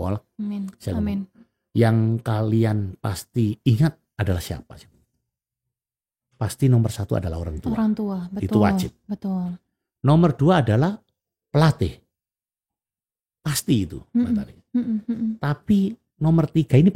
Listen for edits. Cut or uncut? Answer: uncut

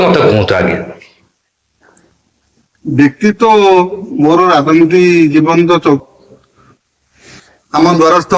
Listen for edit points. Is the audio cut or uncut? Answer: cut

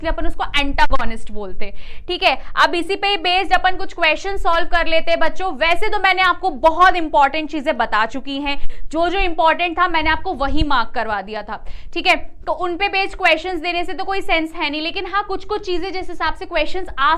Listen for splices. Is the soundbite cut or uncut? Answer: uncut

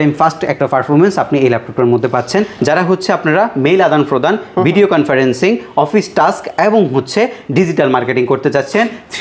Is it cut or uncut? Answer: cut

